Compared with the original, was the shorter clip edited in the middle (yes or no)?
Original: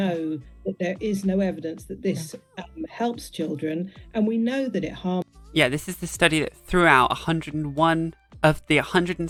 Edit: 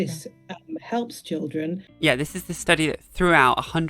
yes